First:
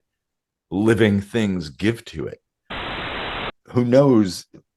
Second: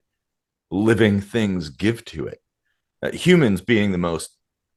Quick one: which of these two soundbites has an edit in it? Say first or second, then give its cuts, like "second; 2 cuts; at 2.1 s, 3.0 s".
first; 1 cut; at 3.1 s